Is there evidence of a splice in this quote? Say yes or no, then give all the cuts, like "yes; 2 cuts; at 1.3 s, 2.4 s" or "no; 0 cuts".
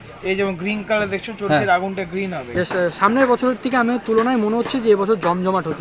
yes; 1 cut; at 2.4 s